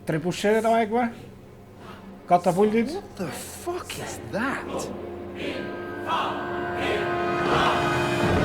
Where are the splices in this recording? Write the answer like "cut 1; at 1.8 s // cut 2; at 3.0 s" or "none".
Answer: cut 1; at 2.9 s